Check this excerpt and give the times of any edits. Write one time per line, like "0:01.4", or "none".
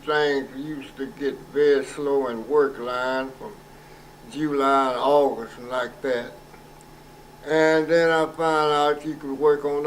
0:07.6